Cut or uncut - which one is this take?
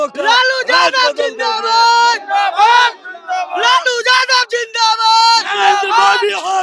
uncut